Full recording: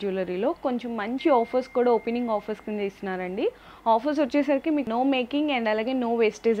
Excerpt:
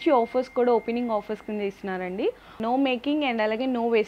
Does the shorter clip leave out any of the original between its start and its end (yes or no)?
yes